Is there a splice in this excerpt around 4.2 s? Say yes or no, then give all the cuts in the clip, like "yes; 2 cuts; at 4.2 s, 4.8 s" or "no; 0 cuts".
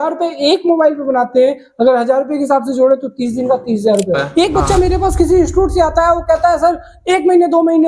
yes; 1 cut; at 4.2 s